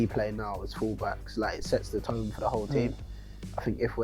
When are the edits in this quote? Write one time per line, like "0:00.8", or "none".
none